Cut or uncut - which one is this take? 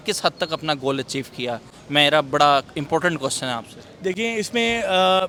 uncut